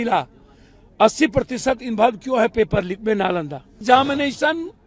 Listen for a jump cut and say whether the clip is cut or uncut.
cut